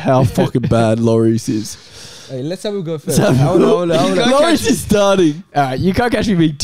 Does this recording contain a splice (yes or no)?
no